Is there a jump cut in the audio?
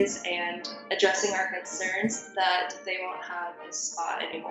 no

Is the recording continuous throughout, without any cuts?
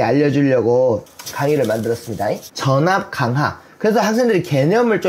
no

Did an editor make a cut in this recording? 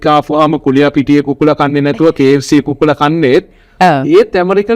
no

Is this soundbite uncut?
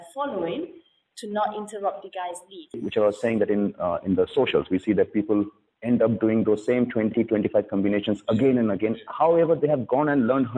no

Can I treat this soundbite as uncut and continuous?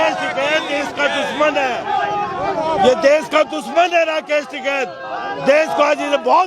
yes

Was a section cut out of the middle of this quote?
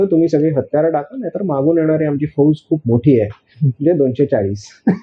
no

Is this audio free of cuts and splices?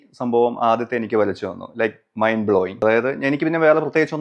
no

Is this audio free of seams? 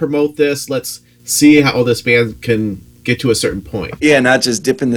no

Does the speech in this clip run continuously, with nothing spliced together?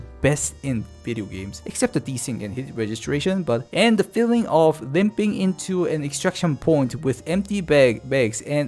yes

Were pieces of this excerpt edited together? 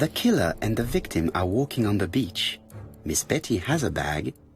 no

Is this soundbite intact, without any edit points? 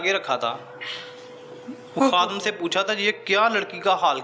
yes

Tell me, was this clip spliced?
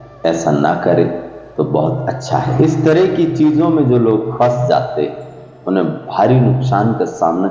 yes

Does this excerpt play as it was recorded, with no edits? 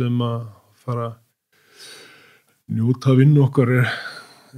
yes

